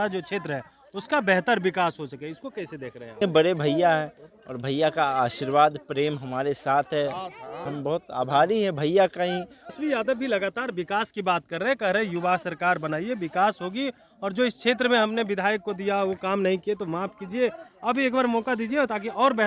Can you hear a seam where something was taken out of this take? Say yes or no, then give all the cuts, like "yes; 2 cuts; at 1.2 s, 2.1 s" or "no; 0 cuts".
yes; 3 cuts; at 3.2 s, 7.6 s, 9.8 s